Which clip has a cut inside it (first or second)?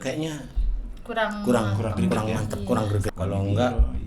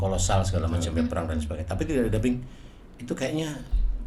first